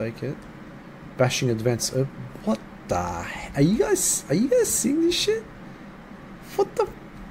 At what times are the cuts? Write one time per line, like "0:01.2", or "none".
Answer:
none